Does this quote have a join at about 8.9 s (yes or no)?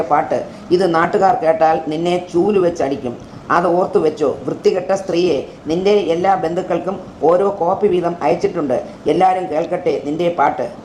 no